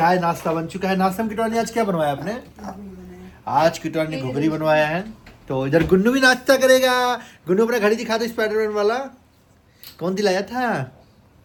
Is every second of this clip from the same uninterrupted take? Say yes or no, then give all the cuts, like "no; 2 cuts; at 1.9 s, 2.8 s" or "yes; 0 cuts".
yes; 0 cuts